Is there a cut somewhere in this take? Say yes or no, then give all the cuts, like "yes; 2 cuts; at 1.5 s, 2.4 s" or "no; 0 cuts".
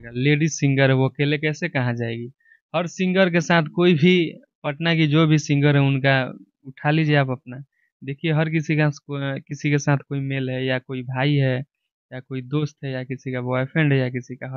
no; 0 cuts